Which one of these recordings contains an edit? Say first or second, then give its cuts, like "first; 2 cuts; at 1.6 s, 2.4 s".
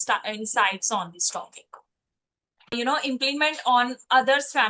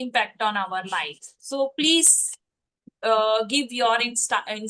first; 1 cut; at 2.7 s